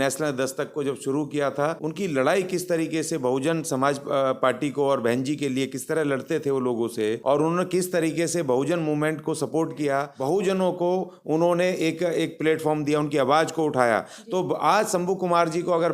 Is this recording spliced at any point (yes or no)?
yes